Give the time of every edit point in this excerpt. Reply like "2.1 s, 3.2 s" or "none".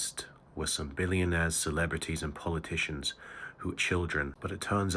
3.8 s